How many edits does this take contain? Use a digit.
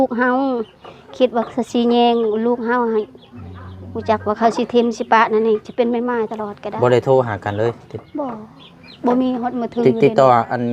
0